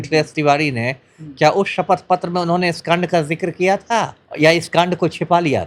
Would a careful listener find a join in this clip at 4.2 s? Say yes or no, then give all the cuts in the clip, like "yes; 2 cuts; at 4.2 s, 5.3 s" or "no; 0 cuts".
yes; 1 cut; at 4.2 s